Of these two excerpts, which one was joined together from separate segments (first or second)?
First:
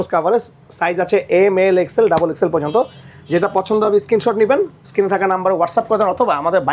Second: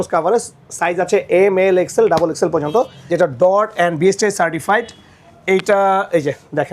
second